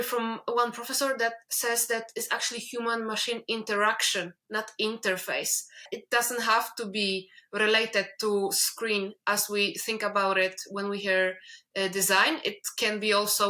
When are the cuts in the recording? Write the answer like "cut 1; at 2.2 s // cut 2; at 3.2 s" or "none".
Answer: cut 1; at 5.9 s

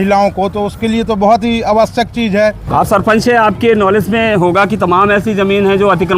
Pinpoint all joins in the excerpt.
cut 1; at 2.7 s

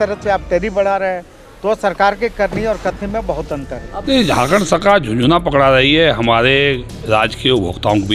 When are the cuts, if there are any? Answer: cut 1; at 3.9 s

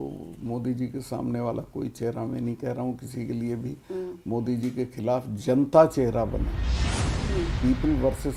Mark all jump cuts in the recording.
none

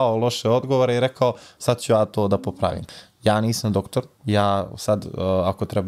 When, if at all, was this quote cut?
cut 1; at 2.8 s

